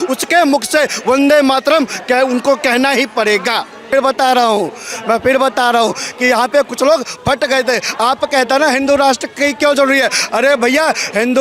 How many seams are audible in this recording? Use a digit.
1